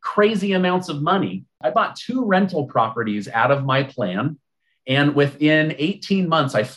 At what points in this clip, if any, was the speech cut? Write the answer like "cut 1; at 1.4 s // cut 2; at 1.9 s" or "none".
cut 1; at 1.6 s